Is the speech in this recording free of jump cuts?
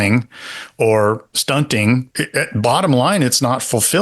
no; 1 cut; at 2.2 s

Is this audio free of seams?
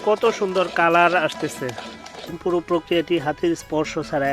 no; 1 cut; at 2.4 s

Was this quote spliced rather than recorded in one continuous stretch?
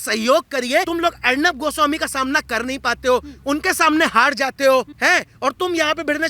yes; 2 cuts; at 0.9 s, 4.9 s

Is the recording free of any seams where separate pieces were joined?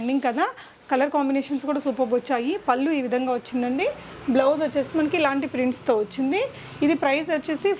yes; 0 cuts

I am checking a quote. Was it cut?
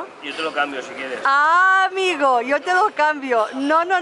no; 0 cuts

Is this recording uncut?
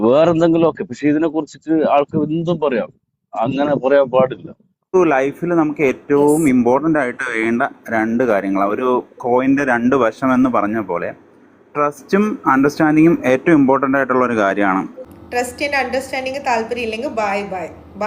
no; 2 cuts; at 5.0 s, 15.0 s

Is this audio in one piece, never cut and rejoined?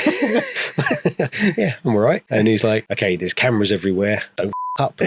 no; 2 cuts; at 2.5 s, 4.3 s

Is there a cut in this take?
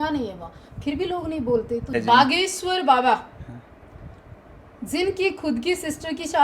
yes; 1 cut; at 2.0 s

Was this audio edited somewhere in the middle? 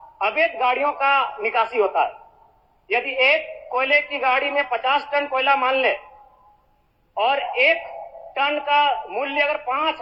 no; 0 cuts

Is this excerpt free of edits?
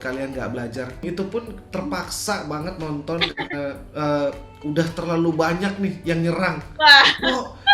no; 1 cut; at 1.0 s

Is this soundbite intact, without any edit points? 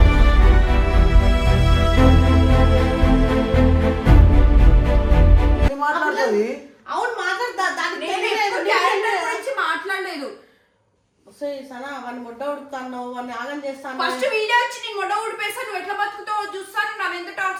yes; 0 cuts

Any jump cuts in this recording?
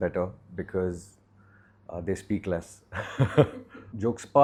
no; 0 cuts

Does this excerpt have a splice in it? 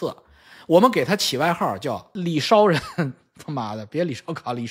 yes; 1 cut; at 2.1 s

